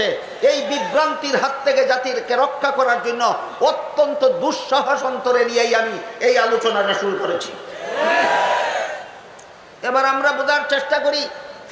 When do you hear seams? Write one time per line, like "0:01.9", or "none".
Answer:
none